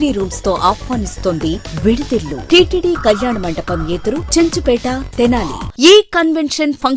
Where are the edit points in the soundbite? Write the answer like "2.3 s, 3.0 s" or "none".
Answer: 2.4 s, 5.6 s